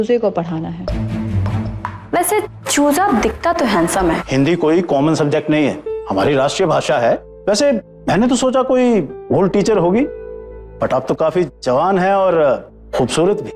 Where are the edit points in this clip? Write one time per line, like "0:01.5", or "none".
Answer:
0:04.2

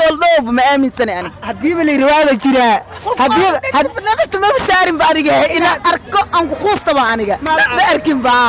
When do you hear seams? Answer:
none

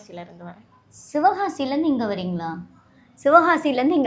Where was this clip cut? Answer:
none

